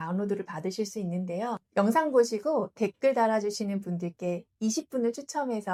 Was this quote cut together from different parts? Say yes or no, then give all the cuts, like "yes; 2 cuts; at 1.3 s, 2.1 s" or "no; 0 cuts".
no; 0 cuts